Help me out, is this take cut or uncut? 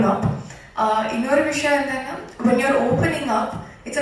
uncut